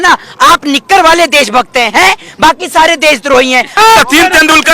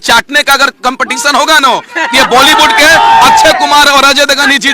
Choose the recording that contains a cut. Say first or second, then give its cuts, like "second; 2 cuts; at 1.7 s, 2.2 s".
first; 1 cut; at 3.7 s